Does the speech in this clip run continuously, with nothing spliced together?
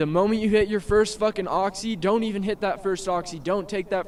yes; 0 cuts

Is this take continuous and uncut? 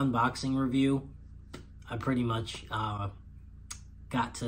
yes; 0 cuts

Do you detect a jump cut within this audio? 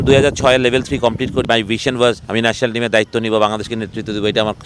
yes; 2 cuts; at 1.4 s, 2.2 s

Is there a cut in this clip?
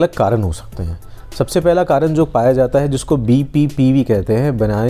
no; 0 cuts

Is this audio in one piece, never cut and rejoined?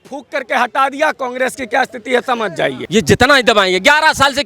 no; 1 cut; at 2.8 s

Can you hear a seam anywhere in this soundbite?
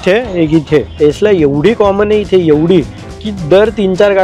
yes; 1 cut; at 0.9 s

